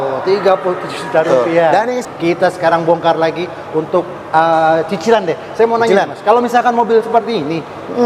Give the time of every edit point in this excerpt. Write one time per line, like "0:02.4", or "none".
0:02.0